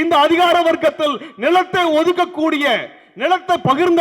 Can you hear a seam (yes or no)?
no